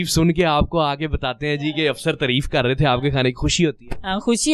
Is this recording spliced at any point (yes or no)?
no